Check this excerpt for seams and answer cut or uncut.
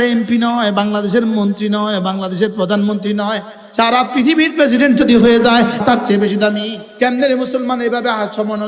cut